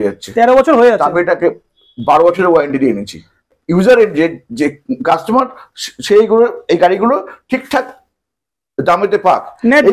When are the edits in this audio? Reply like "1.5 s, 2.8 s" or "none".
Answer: 3.5 s